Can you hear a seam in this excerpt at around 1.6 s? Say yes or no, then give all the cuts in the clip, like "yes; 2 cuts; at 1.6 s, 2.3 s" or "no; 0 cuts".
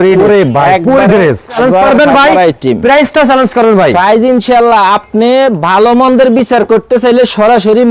yes; 1 cut; at 1.6 s